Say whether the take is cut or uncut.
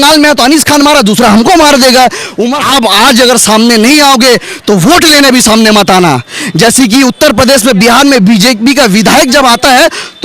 cut